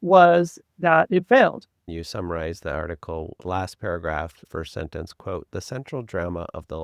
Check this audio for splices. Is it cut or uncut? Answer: cut